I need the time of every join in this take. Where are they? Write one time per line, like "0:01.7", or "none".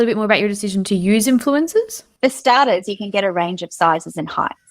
0:02.0